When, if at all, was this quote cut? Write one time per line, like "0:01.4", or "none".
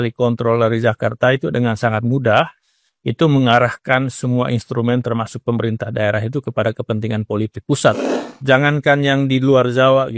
0:08.0